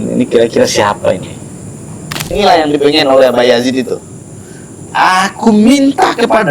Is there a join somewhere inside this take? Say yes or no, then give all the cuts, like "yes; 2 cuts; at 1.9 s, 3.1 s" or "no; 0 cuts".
yes; 1 cut; at 2.3 s